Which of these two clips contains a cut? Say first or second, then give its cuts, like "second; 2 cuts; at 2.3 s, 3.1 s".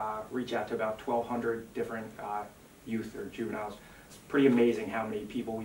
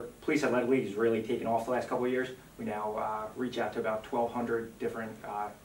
first; 1 cut; at 4.0 s